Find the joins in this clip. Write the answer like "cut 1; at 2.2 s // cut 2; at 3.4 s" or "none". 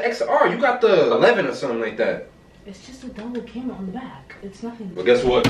cut 1; at 1.1 s